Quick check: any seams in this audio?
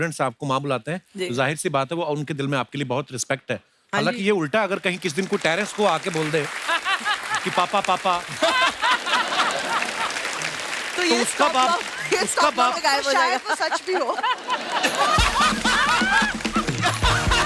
no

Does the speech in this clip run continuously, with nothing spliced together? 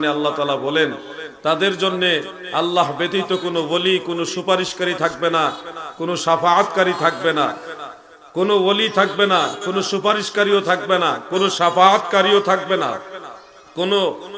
yes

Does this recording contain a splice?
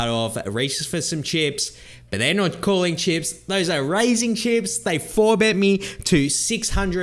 no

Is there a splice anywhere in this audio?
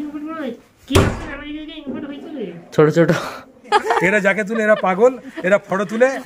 yes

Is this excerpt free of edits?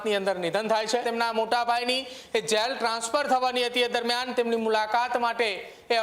no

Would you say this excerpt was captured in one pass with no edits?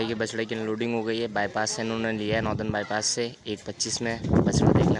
yes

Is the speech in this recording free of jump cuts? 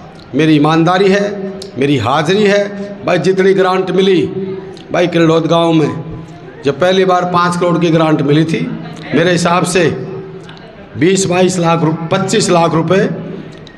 yes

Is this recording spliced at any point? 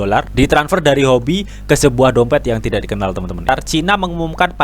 yes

